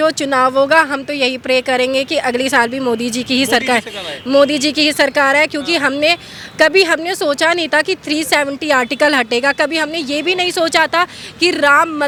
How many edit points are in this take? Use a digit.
0